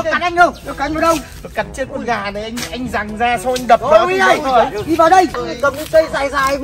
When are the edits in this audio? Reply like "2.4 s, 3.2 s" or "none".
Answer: 5.4 s